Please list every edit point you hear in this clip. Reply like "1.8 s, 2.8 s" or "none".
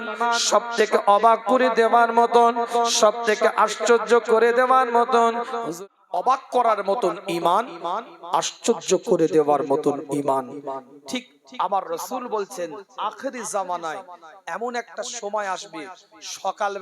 5.6 s